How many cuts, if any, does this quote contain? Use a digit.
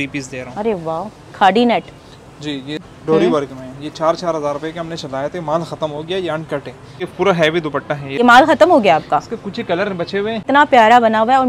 4